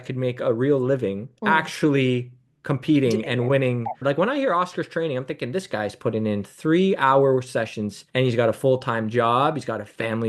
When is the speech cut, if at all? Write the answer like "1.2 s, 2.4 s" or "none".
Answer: 1.3 s, 4.0 s

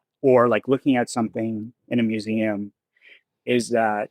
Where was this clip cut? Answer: none

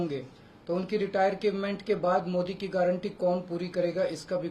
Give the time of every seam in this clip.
none

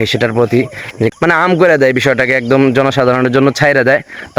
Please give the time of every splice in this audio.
1.1 s

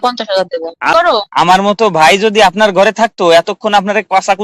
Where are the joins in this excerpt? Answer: 0.9 s

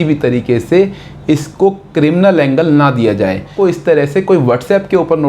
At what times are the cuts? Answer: 3.5 s

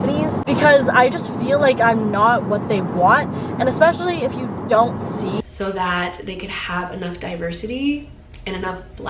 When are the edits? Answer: 5.4 s

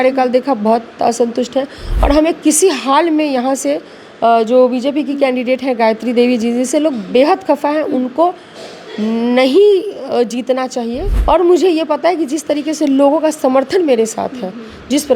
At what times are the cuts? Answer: 11.1 s

